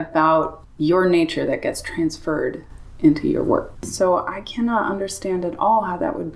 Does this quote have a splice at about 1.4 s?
no; 1 cut; at 3.9 s

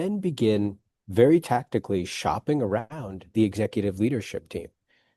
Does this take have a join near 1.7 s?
no; 0 cuts

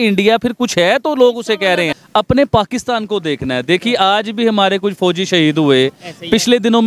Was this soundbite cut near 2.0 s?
yes; 1 cut; at 2.0 s

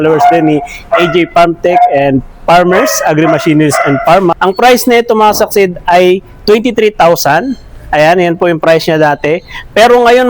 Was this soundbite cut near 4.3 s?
yes; 1 cut; at 4.3 s

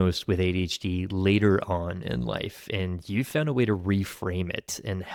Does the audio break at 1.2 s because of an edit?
no; 0 cuts

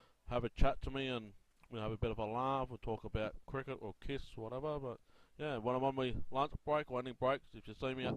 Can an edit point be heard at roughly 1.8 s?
yes; 1 cut; at 1.8 s

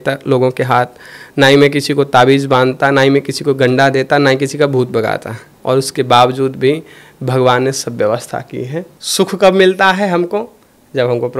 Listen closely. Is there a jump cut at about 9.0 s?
yes; 2 cuts; at 5.5 s, 9.0 s

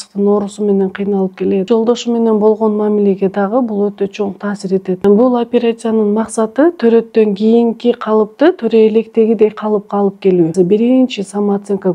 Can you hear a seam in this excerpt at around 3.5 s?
no; 3 cuts; at 1.7 s, 5.0 s, 10.5 s

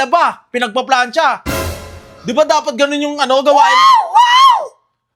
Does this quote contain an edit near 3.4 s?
no; 0 cuts

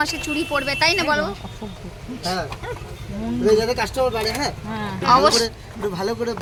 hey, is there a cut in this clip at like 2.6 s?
no; 0 cuts

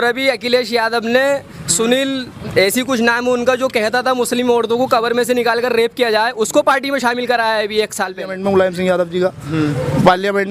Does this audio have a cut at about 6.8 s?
no; 1 cut; at 8.3 s

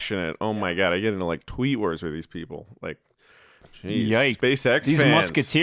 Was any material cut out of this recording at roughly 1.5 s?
no; 2 cuts; at 3.6 s, 4.4 s

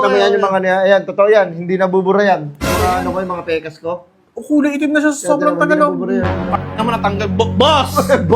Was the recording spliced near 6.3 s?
no; 0 cuts

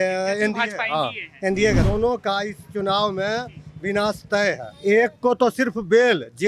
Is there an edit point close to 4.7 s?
yes; 2 cuts; at 1.8 s, 4.7 s

